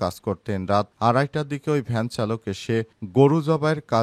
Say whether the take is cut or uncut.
uncut